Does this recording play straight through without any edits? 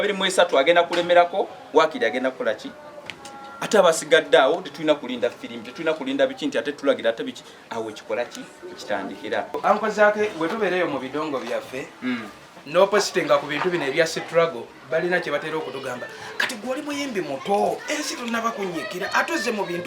no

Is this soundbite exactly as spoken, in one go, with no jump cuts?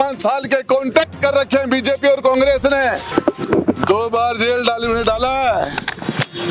no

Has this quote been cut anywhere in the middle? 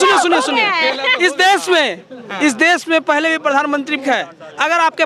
yes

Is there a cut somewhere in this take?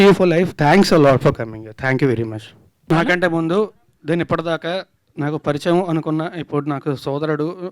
yes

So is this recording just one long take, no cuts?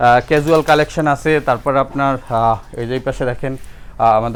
yes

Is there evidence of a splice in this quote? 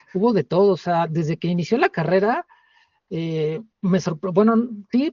no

